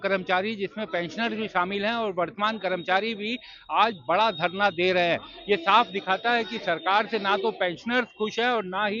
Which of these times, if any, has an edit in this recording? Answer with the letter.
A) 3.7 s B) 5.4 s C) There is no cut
C